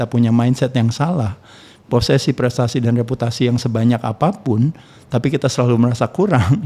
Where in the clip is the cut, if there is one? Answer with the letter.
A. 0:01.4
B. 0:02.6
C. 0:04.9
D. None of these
D